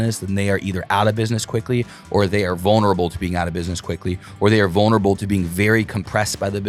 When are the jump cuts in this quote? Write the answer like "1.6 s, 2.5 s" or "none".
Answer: none